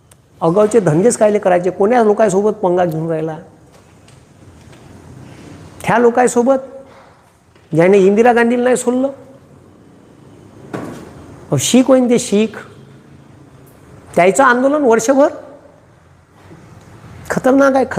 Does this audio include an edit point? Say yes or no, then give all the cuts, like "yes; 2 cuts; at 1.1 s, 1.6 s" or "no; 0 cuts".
no; 0 cuts